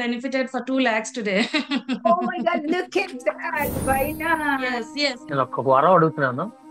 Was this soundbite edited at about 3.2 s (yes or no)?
no